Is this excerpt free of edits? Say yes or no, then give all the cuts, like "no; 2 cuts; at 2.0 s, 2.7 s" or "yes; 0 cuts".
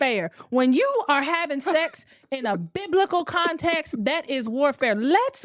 yes; 0 cuts